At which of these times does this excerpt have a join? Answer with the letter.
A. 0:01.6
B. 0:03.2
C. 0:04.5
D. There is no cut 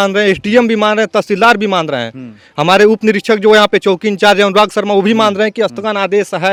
D